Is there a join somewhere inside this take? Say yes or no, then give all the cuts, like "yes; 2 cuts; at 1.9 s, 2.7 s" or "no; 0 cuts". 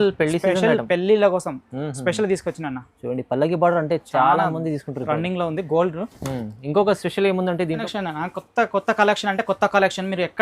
yes; 1 cut; at 7.9 s